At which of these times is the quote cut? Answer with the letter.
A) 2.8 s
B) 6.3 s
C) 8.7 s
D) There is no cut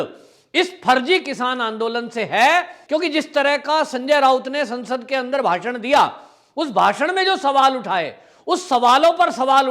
A